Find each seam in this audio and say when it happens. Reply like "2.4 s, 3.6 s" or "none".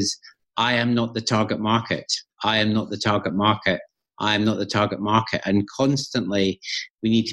none